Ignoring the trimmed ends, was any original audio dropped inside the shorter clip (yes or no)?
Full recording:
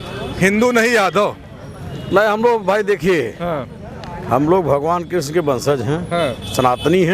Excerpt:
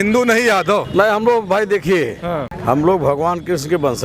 yes